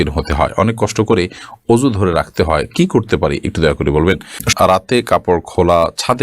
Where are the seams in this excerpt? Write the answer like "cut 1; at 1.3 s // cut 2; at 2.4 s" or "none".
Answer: cut 1; at 4.5 s